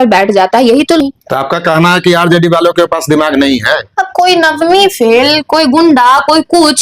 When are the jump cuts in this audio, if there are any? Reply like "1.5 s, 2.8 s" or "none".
1.0 s